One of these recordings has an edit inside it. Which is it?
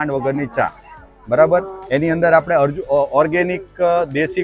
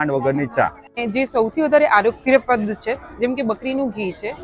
second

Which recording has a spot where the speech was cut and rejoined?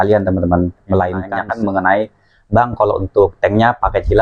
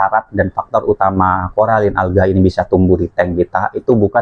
first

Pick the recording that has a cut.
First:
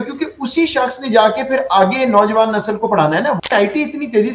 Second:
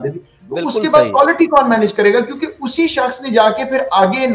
first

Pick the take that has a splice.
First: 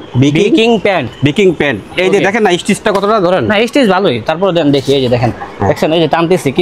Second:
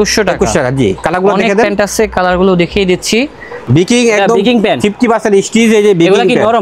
second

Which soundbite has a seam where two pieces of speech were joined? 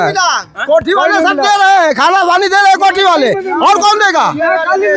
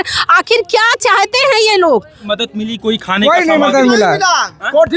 second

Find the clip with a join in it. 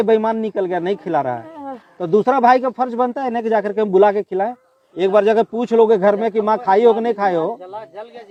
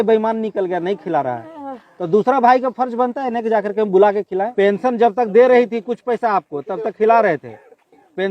second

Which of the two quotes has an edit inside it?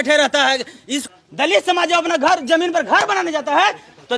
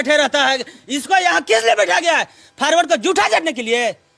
first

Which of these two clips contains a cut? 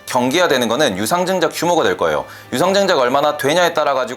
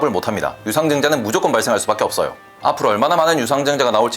second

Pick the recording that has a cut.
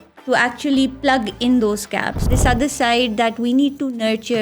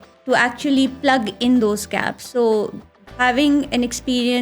first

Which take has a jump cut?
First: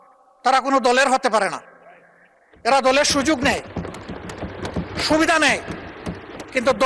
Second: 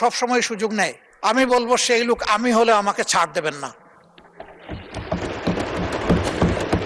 second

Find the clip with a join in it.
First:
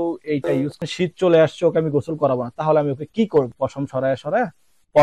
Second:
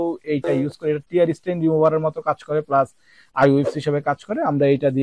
first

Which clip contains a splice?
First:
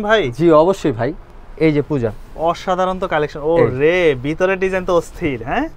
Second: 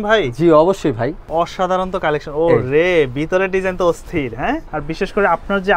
second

